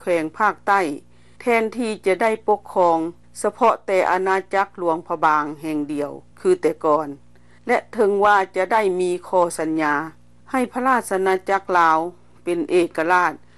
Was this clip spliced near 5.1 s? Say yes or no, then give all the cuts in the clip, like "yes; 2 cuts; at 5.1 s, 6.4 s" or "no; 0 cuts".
yes; 1 cut; at 5.1 s